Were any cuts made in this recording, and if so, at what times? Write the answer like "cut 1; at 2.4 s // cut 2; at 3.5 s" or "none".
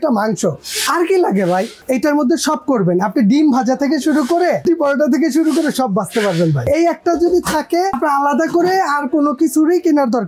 cut 1; at 1.8 s // cut 2; at 4.6 s // cut 3; at 6.7 s // cut 4; at 8.0 s